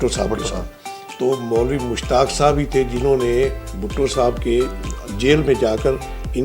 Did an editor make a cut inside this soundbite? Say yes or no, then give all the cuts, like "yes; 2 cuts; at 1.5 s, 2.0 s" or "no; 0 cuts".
yes; 1 cut; at 1.1 s